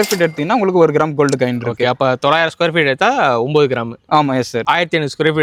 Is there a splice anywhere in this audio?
no; 0 cuts

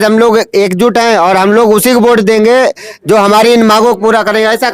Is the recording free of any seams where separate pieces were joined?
yes; 0 cuts

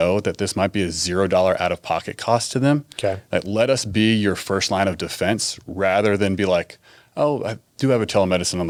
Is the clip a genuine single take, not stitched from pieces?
yes; 0 cuts

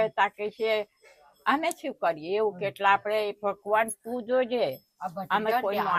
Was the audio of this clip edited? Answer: no; 0 cuts

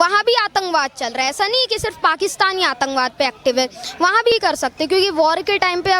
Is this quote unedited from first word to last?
no; 1 cut; at 4.3 s

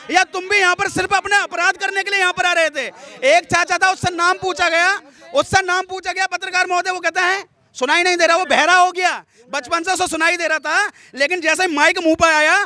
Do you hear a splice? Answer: no; 0 cuts

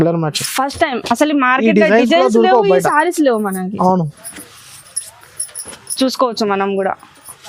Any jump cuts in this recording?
no; 0 cuts

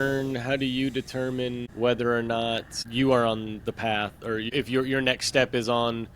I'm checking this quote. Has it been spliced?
yes; 3 cuts; at 1.6 s, 2.8 s, 4.5 s

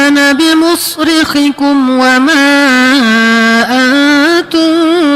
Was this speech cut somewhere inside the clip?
no; 0 cuts

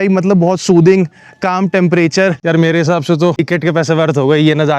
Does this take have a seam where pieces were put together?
yes; 2 cuts; at 2.4 s, 3.4 s

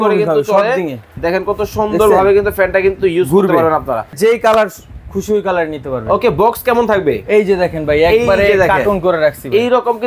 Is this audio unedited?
no; 1 cut; at 4.1 s

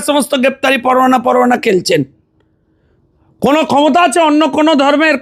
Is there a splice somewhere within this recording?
no; 0 cuts

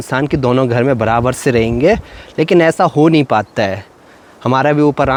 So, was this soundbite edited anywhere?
no; 0 cuts

